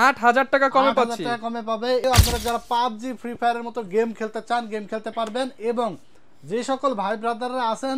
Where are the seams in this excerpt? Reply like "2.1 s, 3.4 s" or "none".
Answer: 2.0 s